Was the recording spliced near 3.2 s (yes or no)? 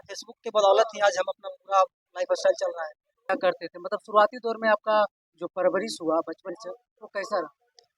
yes